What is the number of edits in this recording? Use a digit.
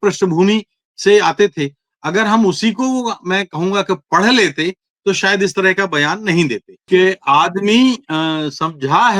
1